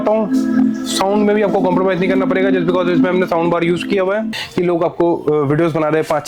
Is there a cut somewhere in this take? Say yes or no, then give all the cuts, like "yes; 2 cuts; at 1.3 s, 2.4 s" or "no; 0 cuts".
yes; 1 cut; at 4.3 s